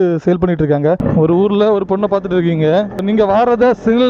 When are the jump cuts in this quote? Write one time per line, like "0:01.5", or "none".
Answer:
0:01.0
0:03.0